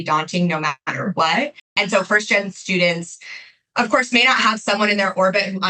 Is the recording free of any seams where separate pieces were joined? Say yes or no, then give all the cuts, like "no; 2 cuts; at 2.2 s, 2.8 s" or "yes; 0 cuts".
no; 1 cut; at 1.7 s